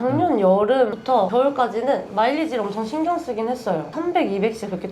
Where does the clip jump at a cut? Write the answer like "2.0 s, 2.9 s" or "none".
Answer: 1.1 s, 3.9 s